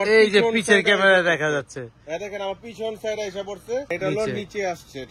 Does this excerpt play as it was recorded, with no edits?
no; 1 cut; at 3.9 s

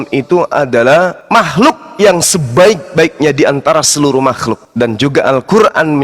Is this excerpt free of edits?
no; 2 cuts; at 1.2 s, 4.6 s

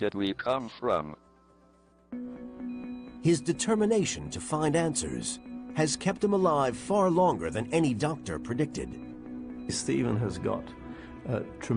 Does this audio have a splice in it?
no; 0 cuts

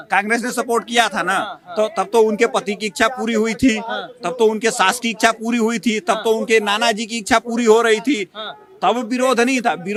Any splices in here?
no; 0 cuts

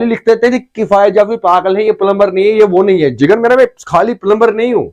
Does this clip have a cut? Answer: no; 0 cuts

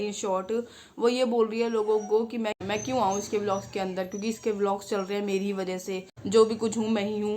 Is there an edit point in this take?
yes; 2 cuts; at 2.6 s, 6.1 s

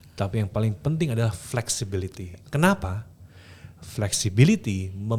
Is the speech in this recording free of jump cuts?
yes; 0 cuts

